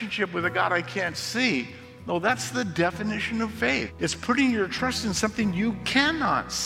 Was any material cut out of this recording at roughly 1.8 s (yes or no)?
no